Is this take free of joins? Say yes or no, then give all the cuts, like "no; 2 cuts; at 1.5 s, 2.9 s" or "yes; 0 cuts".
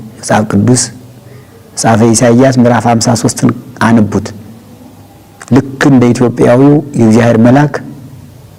yes; 0 cuts